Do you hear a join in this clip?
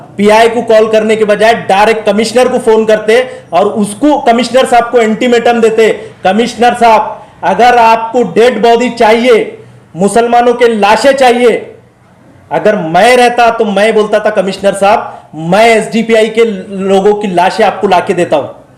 no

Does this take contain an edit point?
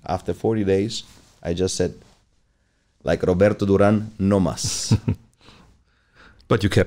no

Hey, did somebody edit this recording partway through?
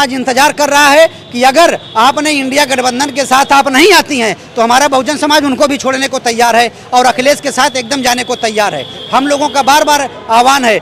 no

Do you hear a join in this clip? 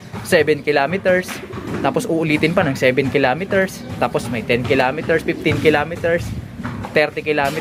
no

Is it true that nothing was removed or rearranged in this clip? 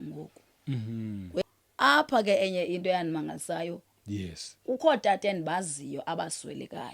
no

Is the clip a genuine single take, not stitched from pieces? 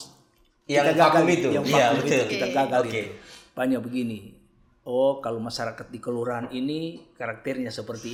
yes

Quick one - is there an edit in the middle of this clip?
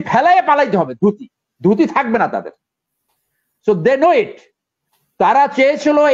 no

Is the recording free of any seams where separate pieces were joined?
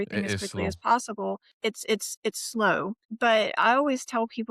no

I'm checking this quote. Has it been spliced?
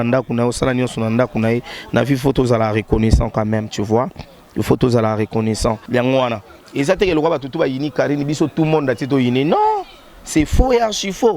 yes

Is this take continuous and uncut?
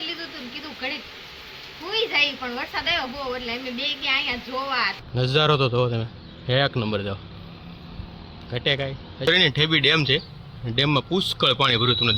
no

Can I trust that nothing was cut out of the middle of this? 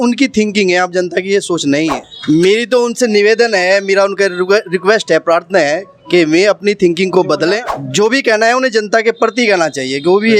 yes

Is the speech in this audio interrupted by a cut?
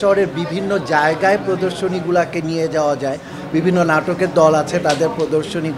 no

